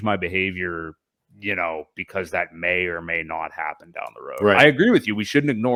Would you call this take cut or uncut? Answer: uncut